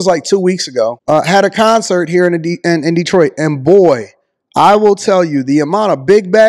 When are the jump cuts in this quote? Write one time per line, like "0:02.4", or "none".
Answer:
0:01.0